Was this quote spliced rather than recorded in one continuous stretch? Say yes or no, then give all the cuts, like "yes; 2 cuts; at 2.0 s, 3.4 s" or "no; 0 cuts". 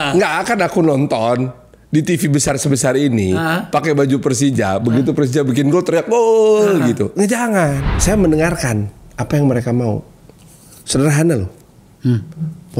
yes; 1 cut; at 7.9 s